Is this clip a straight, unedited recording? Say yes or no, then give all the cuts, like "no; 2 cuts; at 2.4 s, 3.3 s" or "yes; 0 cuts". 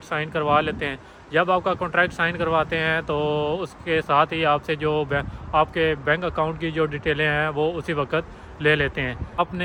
yes; 0 cuts